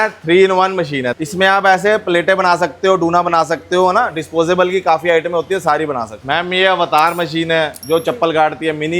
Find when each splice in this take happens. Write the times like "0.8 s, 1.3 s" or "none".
1.1 s, 6.2 s